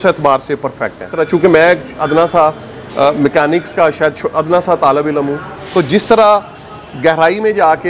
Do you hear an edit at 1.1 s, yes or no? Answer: yes